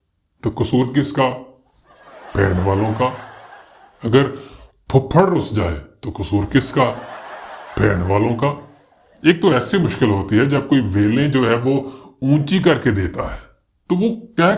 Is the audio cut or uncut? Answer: uncut